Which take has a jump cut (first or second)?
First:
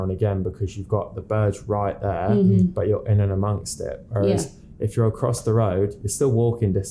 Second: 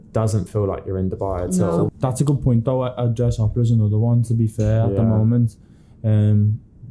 second